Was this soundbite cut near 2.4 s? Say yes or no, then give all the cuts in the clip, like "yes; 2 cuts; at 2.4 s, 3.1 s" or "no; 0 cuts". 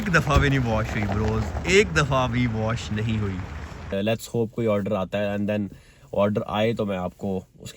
no; 1 cut; at 3.9 s